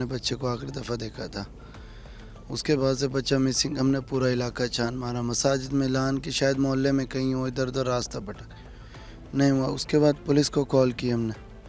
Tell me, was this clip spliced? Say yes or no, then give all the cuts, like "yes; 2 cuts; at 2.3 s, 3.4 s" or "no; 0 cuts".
no; 0 cuts